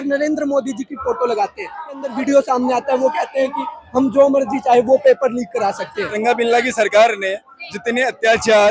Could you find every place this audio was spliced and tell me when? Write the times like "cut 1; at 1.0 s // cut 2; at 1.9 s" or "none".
cut 1; at 2.1 s // cut 2; at 6.1 s